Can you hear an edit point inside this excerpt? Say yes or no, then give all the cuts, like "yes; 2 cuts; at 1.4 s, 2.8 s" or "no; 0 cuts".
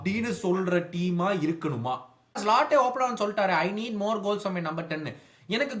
yes; 1 cut; at 2.4 s